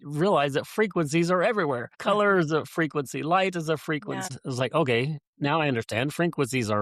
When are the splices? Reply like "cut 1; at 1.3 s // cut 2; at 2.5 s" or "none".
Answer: cut 1; at 1.9 s // cut 2; at 4.3 s